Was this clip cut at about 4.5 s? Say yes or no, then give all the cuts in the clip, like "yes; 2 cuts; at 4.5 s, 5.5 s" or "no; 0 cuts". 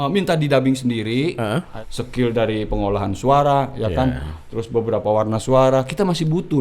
no; 1 cut; at 1.7 s